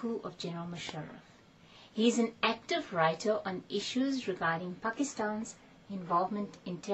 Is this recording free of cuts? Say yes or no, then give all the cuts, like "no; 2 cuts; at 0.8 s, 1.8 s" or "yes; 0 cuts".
no; 1 cut; at 2.4 s